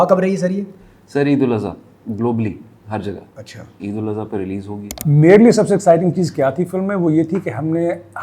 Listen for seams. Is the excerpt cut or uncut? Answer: cut